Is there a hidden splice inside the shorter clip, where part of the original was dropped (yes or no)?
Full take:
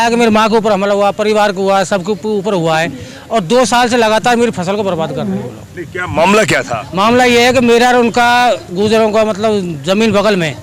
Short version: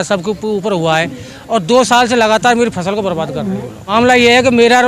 yes